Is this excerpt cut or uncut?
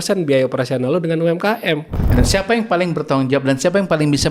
cut